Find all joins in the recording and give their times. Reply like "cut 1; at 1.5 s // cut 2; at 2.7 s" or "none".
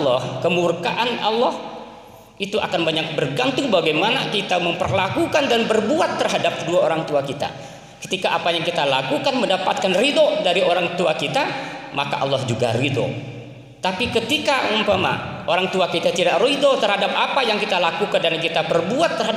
none